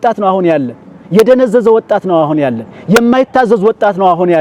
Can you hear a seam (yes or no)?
no